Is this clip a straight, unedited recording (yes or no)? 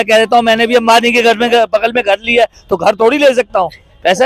yes